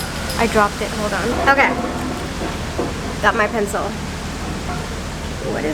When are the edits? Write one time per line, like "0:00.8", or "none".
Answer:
0:01.3